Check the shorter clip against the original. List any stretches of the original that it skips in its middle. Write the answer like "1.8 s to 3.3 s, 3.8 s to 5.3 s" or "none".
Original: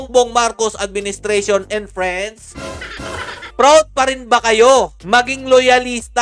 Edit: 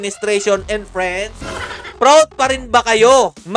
2.5 s to 3.0 s